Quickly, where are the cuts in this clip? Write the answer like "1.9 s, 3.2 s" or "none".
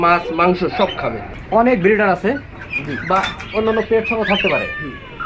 1.3 s